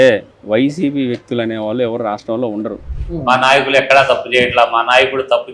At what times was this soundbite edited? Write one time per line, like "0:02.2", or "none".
0:02.9